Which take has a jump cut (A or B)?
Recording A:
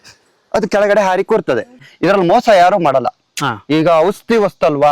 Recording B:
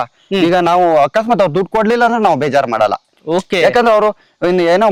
A